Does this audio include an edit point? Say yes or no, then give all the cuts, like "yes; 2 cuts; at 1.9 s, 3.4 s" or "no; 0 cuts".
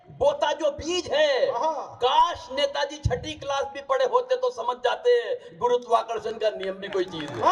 no; 0 cuts